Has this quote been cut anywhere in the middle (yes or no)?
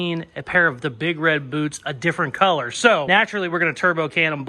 yes